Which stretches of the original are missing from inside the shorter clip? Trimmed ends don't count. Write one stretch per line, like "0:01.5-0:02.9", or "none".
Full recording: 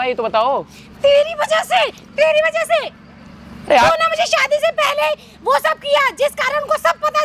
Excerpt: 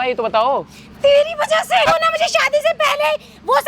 0:01.9-0:03.9

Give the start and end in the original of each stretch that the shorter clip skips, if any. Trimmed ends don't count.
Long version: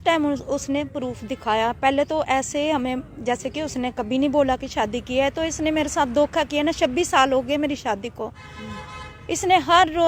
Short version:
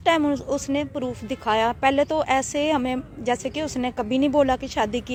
none

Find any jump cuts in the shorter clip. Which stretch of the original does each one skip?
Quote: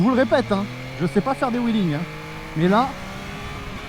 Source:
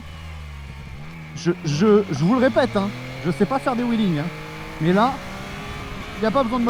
none

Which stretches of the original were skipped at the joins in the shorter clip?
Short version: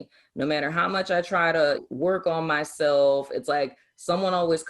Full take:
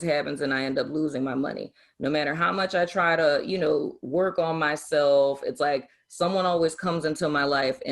0:03.5-0:04.0

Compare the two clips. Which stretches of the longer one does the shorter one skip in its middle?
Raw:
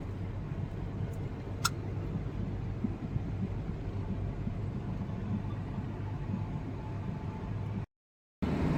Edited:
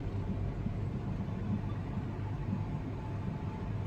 none

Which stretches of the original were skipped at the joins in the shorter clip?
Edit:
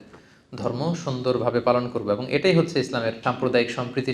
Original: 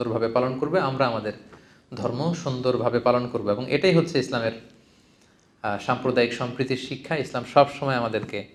0:04.6-0:05.8

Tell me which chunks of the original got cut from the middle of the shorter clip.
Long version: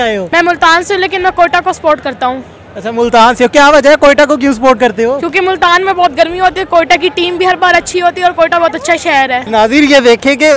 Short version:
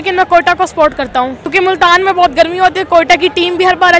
0:02.5-0:05.3

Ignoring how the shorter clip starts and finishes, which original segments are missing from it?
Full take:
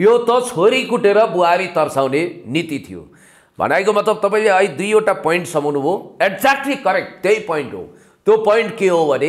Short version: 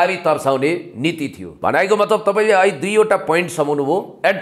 0:02.9-0:03.4

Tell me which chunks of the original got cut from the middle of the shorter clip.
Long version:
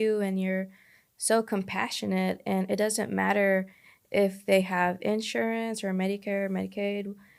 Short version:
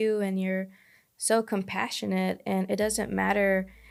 none

